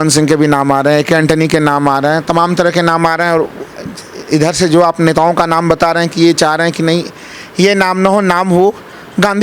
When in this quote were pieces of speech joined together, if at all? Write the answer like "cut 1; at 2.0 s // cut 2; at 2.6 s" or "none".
none

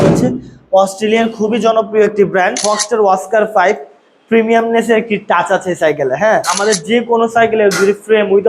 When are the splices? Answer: cut 1; at 2.6 s // cut 2; at 6.5 s

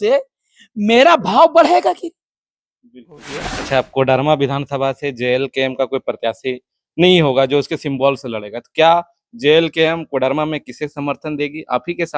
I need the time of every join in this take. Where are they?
cut 1; at 3.3 s

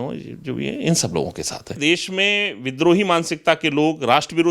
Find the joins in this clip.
cut 1; at 1.7 s

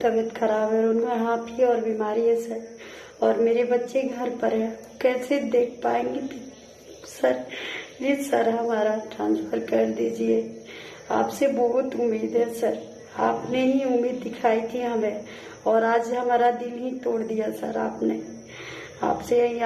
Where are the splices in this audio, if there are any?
none

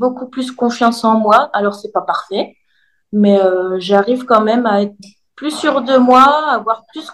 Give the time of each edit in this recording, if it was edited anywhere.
none

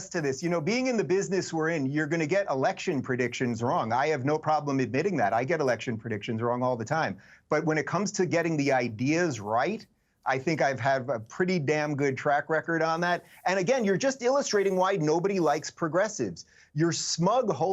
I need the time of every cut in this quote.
cut 1; at 4.2 s

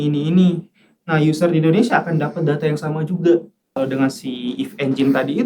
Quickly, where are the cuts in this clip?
cut 1; at 3.8 s

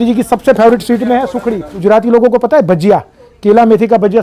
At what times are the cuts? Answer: cut 1; at 1.8 s

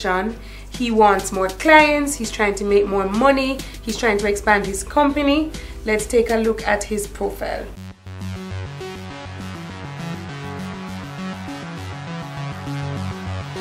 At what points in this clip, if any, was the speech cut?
cut 1; at 7.8 s

